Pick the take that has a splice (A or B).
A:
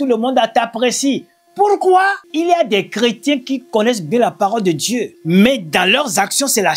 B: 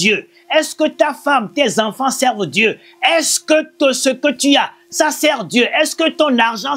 A